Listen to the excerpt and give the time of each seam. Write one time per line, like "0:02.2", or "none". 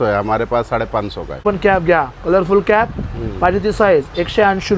0:01.4